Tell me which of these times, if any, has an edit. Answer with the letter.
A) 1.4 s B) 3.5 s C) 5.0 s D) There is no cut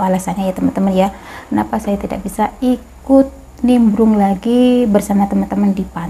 D